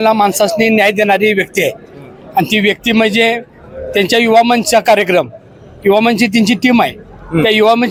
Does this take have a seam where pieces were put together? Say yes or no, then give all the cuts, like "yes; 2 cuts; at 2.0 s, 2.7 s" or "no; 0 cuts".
no; 0 cuts